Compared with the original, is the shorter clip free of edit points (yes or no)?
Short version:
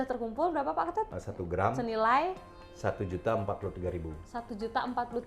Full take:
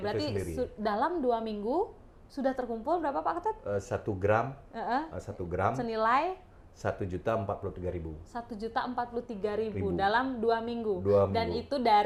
no